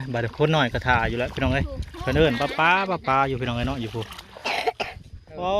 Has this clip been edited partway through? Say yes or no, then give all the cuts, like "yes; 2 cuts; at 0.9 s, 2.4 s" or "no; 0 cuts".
yes; 1 cut; at 4.3 s